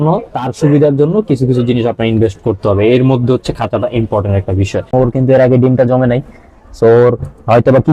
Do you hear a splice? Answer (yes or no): yes